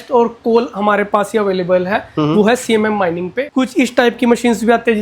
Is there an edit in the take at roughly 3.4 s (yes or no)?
yes